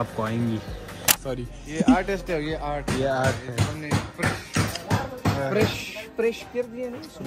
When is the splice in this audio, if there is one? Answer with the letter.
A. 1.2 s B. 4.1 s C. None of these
A